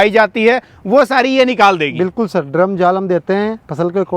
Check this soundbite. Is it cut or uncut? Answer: uncut